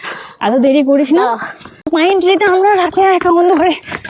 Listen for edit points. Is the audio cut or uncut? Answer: cut